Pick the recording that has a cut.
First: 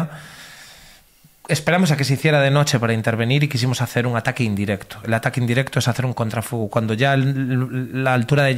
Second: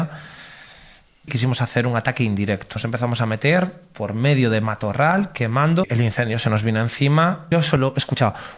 second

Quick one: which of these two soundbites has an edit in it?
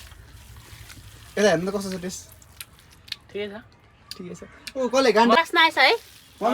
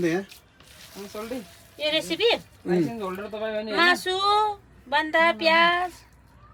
first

